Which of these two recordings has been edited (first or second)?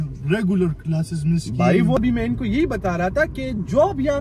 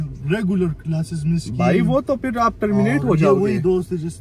first